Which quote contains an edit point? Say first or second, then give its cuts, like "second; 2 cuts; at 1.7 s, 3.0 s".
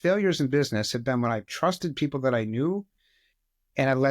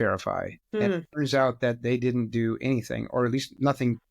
second; 1 cut; at 0.9 s